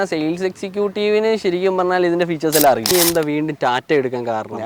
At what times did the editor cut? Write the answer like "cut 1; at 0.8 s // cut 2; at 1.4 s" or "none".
cut 1; at 2.9 s